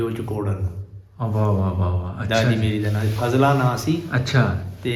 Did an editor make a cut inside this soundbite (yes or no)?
no